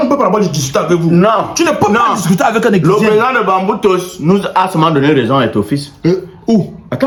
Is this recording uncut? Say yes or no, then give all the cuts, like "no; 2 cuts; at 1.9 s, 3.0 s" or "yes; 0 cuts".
yes; 0 cuts